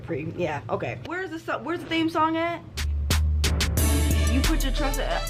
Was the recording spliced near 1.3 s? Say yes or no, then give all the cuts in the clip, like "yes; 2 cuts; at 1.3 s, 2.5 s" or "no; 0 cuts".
yes; 1 cut; at 1.3 s